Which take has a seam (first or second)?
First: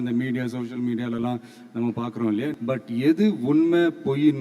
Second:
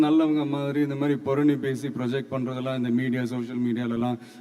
first